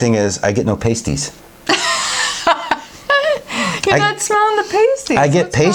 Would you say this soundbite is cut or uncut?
uncut